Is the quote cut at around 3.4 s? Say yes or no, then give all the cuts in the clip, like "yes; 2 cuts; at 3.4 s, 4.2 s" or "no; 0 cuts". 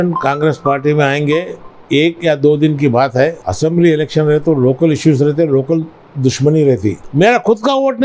yes; 2 cuts; at 3.4 s, 7.0 s